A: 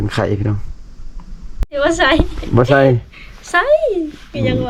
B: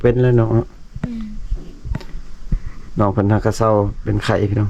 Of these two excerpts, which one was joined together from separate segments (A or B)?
A